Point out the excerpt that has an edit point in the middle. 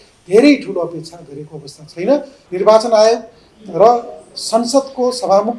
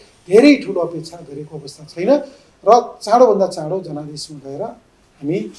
first; 1 cut; at 2.4 s

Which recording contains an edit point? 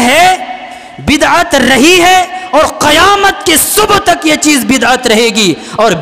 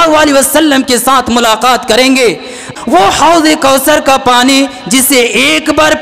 second; 1 cut; at 2.7 s

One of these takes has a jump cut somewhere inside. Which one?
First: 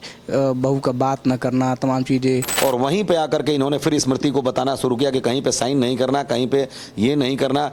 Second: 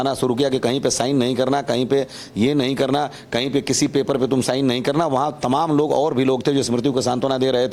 first; 1 cut; at 2.5 s

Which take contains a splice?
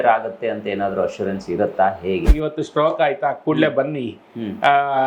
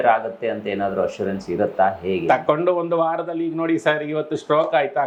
first; 1 cut; at 2.2 s

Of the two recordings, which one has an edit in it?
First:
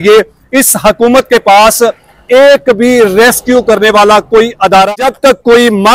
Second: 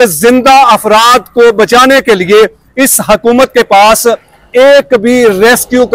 first; 1 cut; at 4.9 s

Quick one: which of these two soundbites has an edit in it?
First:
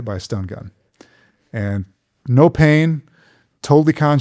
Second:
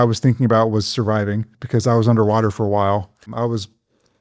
second; 2 cuts; at 1.6 s, 3.3 s

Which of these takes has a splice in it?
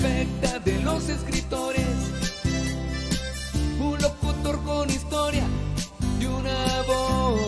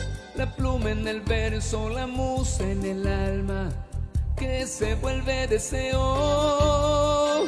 second; 1 cut; at 2.4 s

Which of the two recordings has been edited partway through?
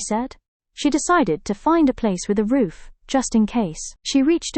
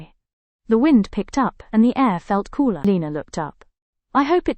second; 1 cut; at 2.8 s

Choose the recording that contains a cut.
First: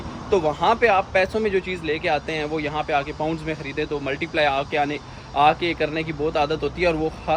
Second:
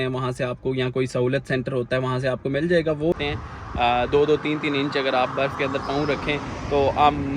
second; 1 cut; at 3.1 s

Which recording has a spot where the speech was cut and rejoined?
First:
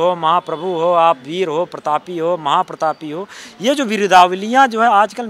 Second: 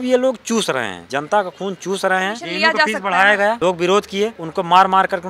second; 4 cuts; at 1.0 s, 2.4 s, 3.6 s, 4.4 s

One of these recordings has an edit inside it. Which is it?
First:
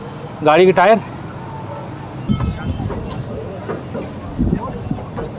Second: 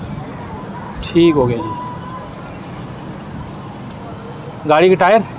first; 1 cut; at 2.2 s

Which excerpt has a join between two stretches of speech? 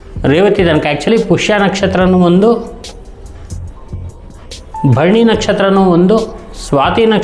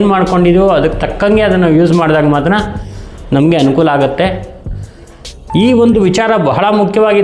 first; 1 cut; at 1.1 s

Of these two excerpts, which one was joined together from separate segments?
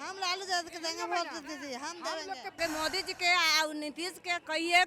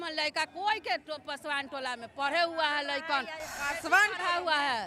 first; 1 cut; at 2.5 s

